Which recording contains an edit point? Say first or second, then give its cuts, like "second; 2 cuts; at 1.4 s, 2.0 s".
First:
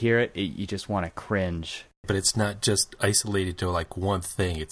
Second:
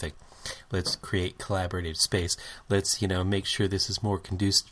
first; 1 cut; at 2.0 s